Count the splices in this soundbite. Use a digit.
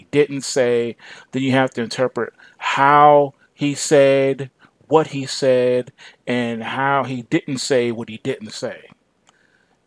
1